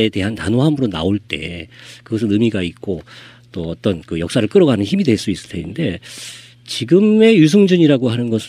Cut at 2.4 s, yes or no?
yes